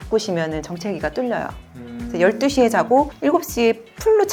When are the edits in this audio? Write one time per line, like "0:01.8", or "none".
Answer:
none